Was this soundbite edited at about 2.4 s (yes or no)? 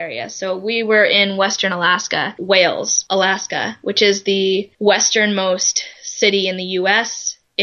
yes